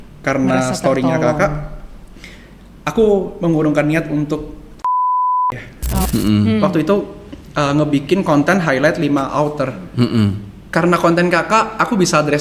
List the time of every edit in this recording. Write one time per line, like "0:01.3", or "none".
0:06.0